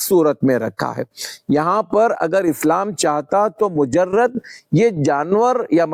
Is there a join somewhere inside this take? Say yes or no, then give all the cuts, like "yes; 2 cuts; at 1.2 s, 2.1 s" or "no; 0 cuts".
no; 0 cuts